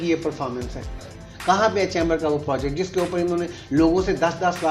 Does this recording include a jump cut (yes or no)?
yes